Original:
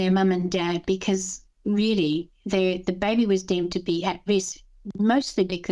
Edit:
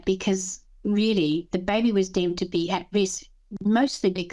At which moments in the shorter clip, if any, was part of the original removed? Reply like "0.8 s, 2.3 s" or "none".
1.5 s